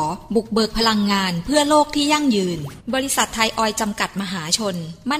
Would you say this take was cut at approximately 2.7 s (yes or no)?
yes